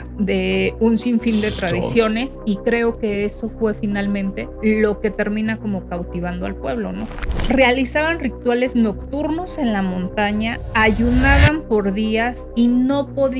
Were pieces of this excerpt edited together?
yes; 2 cuts; at 4.5 s, 7.4 s

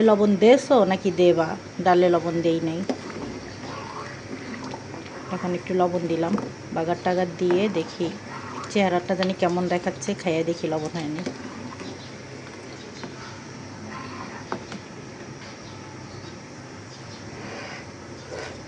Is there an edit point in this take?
no; 0 cuts

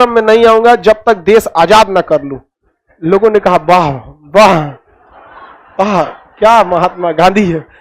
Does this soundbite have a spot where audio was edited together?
no; 0 cuts

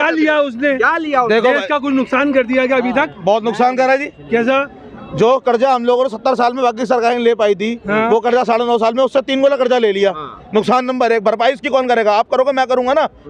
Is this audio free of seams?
yes; 0 cuts

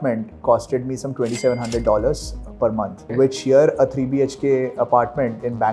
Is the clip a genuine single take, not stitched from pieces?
yes; 0 cuts

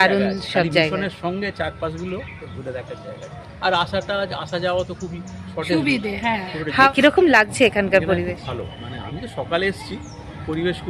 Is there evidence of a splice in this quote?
yes; 1 cut; at 6.9 s

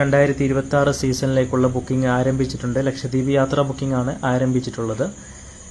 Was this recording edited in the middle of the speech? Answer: no; 0 cuts

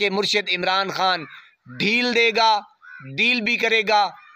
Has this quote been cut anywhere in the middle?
no; 0 cuts

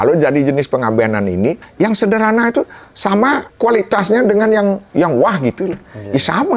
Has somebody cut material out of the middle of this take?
yes; 3 cuts; at 1.6 s, 3.5 s, 4.8 s

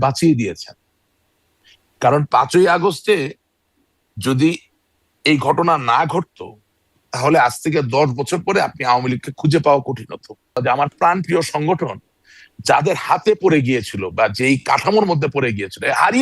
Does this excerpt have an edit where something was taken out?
yes; 1 cut; at 10.6 s

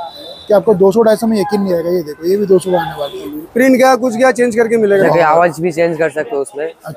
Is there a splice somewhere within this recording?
yes; 2 cuts; at 3.6 s, 5.0 s

